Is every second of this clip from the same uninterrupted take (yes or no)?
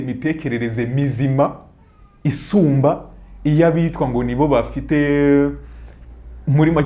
yes